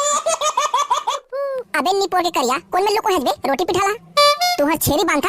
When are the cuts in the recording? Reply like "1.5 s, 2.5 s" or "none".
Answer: 1.2 s